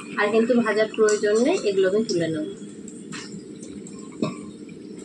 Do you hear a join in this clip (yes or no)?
no